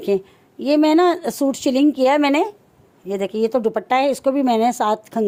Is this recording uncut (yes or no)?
yes